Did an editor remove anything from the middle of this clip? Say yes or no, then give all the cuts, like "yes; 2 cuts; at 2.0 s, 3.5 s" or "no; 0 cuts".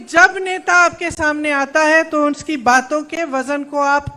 no; 0 cuts